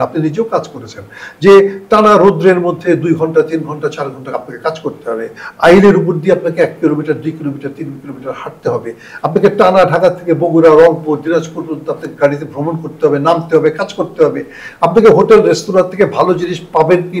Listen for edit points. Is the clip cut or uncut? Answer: uncut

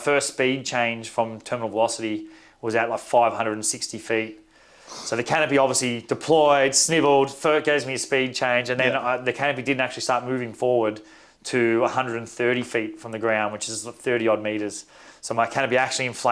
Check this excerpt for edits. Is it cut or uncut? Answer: uncut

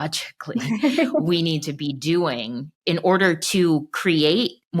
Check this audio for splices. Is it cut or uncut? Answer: cut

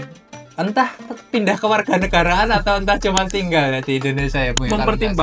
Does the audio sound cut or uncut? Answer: uncut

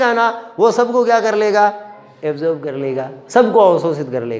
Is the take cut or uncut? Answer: uncut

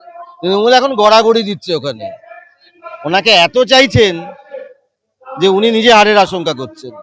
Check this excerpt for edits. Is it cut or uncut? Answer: cut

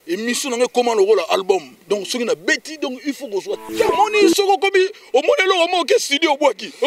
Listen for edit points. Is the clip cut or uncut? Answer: cut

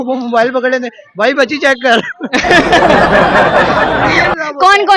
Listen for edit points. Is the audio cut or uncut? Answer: uncut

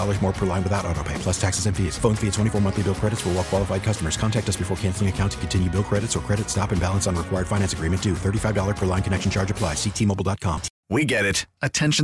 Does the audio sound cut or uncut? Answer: cut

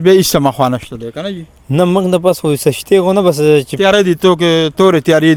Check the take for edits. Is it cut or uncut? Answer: uncut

